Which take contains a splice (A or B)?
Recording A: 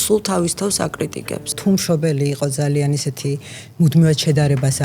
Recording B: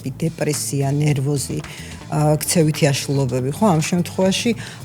A